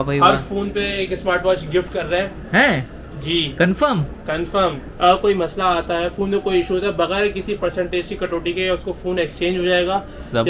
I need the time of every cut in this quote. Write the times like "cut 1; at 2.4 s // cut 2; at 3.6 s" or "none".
cut 1; at 4.9 s